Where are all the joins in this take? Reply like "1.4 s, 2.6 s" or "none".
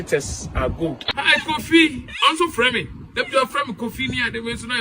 1.1 s